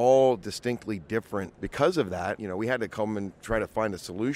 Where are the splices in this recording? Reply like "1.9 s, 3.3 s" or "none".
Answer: 1.6 s, 2.4 s